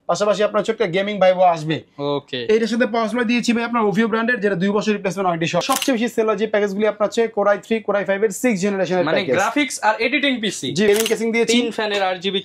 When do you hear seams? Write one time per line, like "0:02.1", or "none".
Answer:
0:05.6
0:10.9